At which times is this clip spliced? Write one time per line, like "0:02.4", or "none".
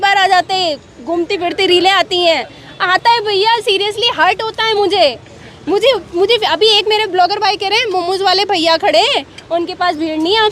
none